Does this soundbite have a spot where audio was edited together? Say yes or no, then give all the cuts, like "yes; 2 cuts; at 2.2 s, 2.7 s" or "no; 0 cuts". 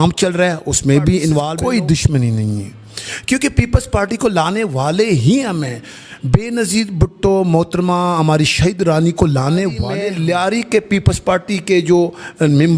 yes; 2 cuts; at 1.5 s, 10.0 s